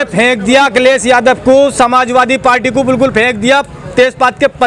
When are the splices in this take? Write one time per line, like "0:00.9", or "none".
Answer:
none